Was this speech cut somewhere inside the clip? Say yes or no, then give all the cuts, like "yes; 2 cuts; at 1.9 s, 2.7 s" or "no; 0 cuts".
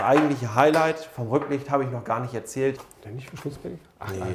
yes; 1 cut; at 2.8 s